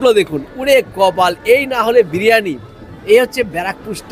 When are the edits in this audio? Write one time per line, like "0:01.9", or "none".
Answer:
none